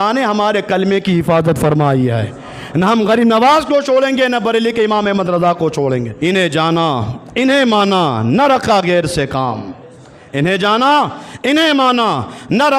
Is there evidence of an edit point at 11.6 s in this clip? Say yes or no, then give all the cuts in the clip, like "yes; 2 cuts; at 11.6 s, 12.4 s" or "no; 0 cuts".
no; 1 cut; at 6.1 s